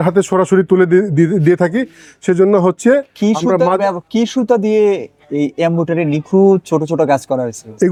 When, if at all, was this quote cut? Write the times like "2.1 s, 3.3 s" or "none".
none